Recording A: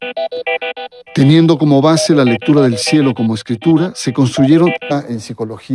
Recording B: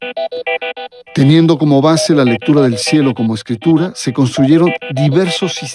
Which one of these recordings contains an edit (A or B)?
B